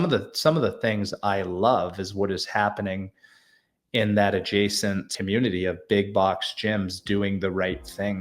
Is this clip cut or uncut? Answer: cut